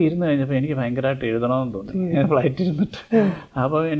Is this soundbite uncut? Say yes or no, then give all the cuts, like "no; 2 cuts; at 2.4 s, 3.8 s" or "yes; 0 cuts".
yes; 0 cuts